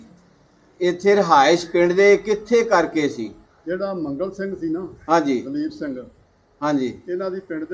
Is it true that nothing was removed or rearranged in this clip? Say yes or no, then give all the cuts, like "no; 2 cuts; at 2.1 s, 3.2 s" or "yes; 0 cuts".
no; 1 cut; at 3.5 s